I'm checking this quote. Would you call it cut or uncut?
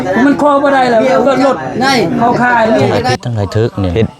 cut